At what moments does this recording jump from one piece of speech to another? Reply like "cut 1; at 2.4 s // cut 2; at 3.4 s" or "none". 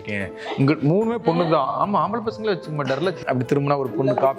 cut 1; at 3.2 s